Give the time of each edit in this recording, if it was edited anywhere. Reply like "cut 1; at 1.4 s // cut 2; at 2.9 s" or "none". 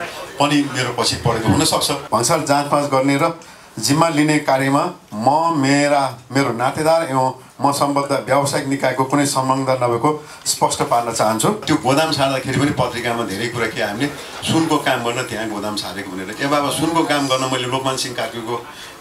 cut 1; at 2.0 s // cut 2; at 11.6 s